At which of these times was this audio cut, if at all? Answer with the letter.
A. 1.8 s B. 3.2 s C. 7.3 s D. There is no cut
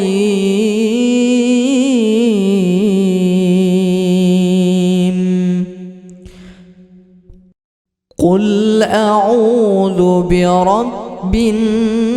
C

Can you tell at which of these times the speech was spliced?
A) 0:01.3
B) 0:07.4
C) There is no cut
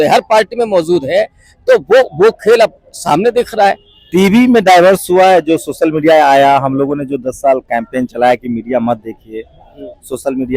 C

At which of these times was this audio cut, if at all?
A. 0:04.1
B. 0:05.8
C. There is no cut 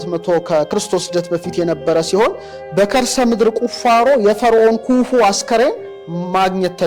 C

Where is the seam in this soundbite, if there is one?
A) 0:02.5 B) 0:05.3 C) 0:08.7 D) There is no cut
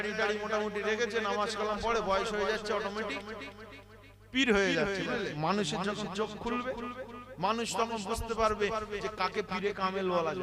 B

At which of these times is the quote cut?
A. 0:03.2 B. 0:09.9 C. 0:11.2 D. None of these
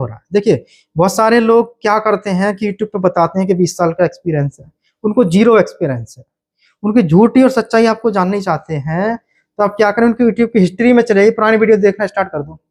D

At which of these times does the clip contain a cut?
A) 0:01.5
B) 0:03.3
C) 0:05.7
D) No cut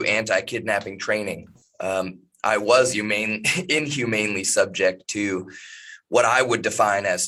D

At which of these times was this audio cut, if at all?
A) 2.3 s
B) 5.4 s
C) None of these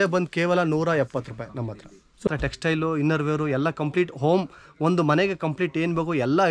A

